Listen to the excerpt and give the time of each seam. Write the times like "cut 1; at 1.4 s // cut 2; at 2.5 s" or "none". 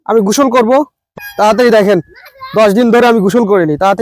cut 1; at 1.1 s